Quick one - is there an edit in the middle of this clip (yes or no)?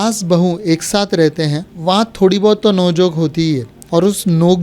yes